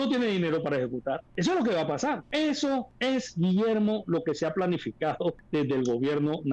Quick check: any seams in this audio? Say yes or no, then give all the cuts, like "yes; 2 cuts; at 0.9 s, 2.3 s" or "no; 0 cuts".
yes; 4 cuts; at 1.3 s, 2.2 s, 2.9 s, 5.4 s